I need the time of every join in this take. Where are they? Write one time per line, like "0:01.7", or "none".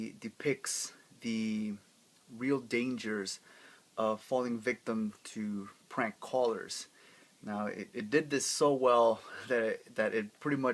0:07.3